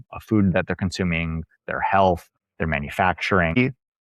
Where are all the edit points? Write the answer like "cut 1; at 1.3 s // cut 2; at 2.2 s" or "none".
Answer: none